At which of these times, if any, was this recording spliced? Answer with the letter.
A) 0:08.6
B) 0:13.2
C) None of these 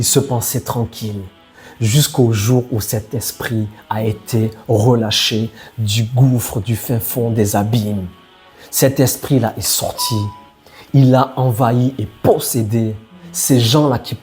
C